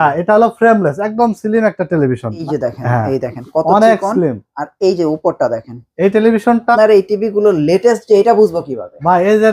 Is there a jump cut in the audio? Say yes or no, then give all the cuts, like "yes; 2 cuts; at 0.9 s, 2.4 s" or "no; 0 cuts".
yes; 2 cuts; at 2.4 s, 6.7 s